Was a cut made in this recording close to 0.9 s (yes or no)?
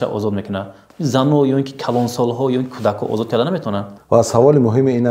no